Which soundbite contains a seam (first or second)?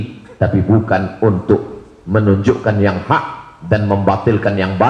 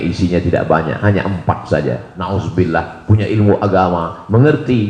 second